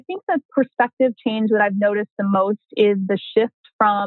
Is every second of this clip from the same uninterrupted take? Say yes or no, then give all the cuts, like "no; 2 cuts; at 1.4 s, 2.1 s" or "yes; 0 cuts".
yes; 0 cuts